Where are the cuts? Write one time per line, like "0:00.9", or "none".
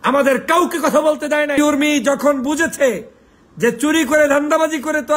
0:01.6